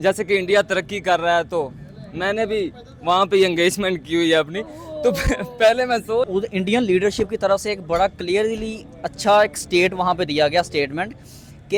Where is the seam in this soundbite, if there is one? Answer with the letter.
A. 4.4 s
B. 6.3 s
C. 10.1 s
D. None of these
B